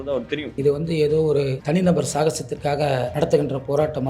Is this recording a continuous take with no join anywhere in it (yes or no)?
no